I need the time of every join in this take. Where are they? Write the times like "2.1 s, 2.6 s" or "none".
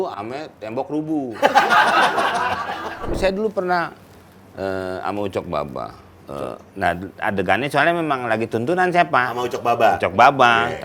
3.0 s